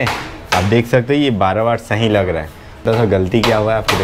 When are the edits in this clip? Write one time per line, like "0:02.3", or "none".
0:02.8